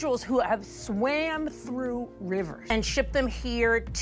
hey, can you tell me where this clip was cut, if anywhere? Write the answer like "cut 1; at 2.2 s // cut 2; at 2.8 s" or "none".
cut 1; at 2.6 s